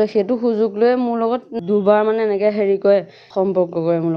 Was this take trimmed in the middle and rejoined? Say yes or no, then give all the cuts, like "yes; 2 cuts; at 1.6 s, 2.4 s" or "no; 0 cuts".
yes; 2 cuts; at 1.5 s, 3.2 s